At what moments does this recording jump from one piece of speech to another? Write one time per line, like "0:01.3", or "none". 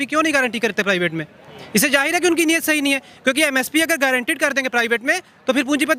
none